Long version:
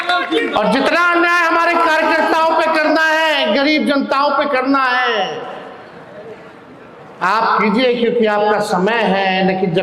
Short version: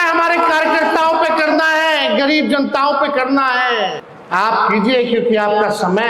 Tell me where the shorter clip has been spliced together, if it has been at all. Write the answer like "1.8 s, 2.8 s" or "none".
4.1 s